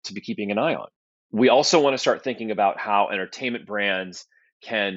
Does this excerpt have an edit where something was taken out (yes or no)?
no